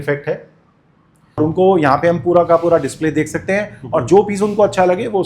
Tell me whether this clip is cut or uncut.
cut